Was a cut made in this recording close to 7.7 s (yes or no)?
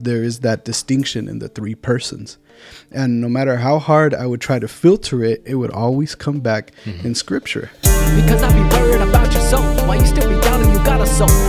yes